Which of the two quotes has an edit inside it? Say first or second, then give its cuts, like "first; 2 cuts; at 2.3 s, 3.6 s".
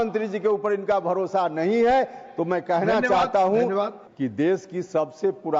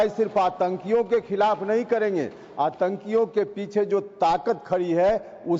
first; 1 cut; at 4.0 s